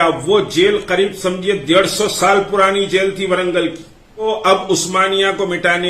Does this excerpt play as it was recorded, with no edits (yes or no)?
no